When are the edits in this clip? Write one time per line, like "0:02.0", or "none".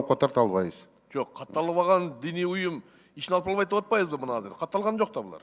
none